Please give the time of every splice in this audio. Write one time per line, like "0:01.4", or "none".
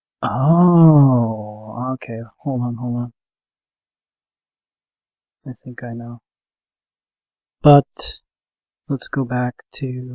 0:00.9